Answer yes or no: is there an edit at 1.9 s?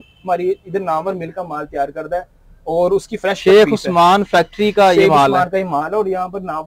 no